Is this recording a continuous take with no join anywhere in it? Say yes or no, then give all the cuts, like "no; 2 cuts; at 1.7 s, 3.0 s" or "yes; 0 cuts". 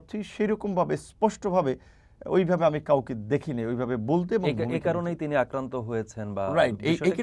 yes; 0 cuts